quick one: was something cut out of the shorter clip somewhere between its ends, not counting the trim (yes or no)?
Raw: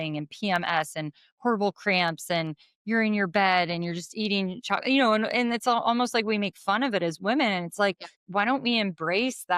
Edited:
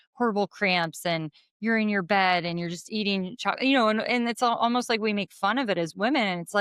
no